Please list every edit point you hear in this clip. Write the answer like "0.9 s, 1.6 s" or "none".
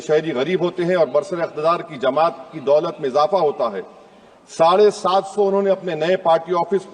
none

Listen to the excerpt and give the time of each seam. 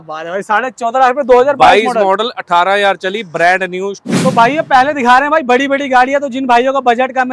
4.1 s

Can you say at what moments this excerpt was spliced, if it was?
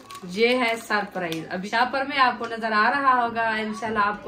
1.7 s

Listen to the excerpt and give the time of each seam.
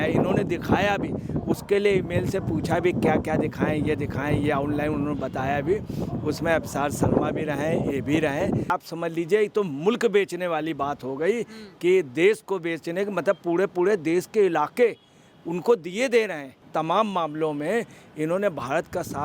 8.7 s, 16.6 s

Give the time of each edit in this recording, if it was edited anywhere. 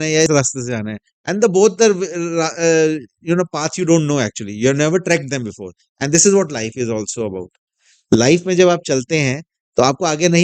none

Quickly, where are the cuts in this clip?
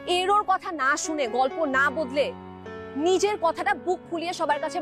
none

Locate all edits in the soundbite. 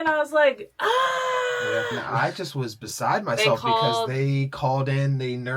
2.1 s

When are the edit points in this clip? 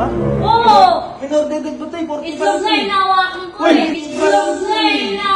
none

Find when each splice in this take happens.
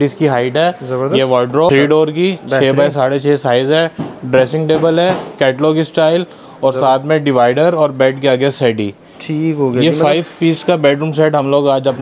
1.7 s

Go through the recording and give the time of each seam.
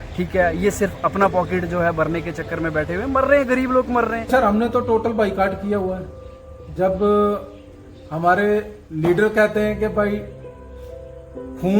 4.3 s

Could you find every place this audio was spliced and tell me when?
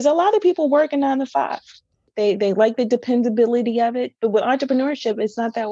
2.0 s

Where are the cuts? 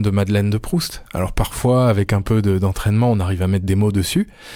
none

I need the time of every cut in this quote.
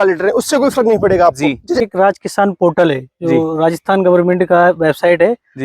1.8 s

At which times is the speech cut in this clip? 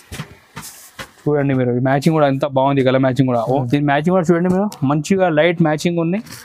3.5 s

